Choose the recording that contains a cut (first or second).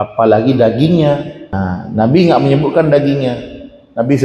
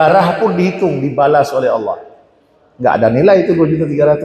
first